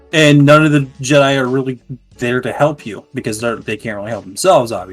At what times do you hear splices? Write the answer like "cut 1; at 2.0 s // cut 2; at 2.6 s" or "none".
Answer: none